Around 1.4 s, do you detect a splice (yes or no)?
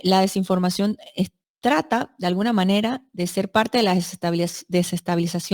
yes